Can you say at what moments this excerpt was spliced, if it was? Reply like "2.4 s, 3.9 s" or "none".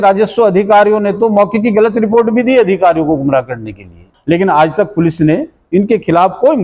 4.1 s